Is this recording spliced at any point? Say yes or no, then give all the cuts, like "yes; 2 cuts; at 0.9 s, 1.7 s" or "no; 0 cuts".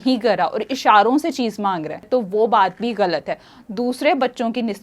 no; 0 cuts